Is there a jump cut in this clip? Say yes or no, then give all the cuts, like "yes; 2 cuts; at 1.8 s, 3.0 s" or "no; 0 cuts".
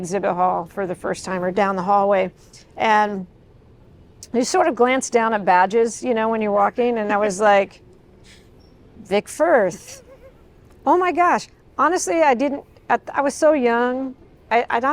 no; 0 cuts